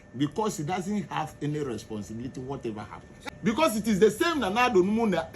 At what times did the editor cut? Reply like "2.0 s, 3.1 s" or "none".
3.1 s